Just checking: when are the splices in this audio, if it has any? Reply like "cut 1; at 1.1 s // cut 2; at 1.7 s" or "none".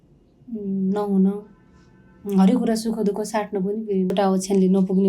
cut 1; at 4.1 s